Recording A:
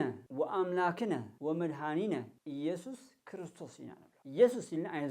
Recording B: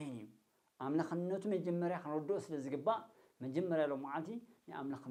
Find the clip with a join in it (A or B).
A